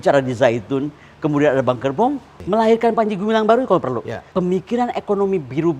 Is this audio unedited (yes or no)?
no